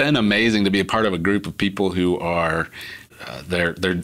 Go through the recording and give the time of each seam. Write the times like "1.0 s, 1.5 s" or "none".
3.1 s